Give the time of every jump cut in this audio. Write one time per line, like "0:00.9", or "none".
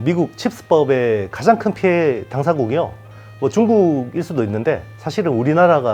0:05.0